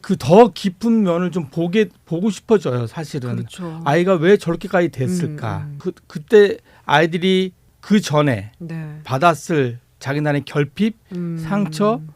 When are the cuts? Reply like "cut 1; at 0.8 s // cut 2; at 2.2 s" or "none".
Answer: cut 1; at 5.7 s // cut 2; at 7.7 s